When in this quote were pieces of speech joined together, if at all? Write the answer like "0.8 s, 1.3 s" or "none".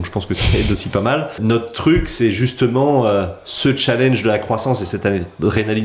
1.4 s